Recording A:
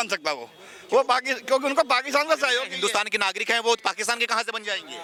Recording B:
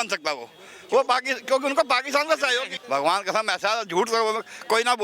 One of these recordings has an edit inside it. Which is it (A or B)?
B